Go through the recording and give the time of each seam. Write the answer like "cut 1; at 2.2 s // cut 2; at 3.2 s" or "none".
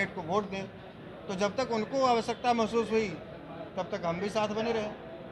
none